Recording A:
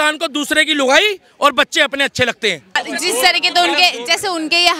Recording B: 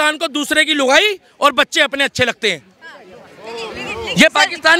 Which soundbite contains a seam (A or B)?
A